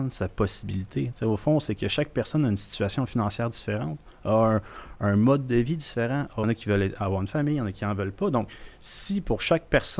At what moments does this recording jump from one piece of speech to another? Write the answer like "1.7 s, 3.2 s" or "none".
6.4 s